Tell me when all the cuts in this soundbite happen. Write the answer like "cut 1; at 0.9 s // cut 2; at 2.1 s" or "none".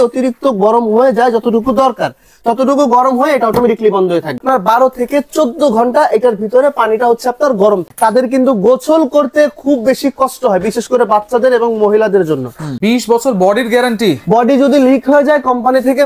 cut 1; at 4.4 s // cut 2; at 7.9 s // cut 3; at 12.7 s

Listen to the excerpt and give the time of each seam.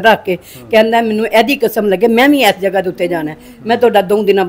none

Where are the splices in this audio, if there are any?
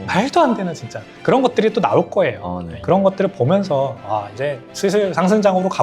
cut 1; at 1.1 s // cut 2; at 2.7 s

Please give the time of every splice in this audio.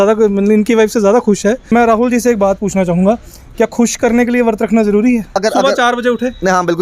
cut 1; at 1.7 s // cut 2; at 5.4 s

